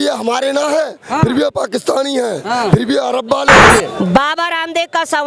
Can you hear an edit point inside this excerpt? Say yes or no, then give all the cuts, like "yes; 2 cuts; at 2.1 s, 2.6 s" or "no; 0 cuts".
yes; 1 cut; at 3.6 s